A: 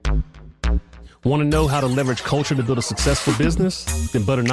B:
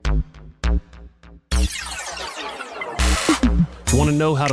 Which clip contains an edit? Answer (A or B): A